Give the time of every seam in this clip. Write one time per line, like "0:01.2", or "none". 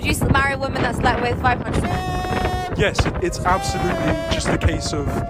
none